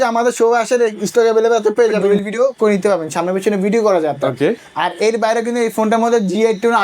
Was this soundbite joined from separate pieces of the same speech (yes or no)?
yes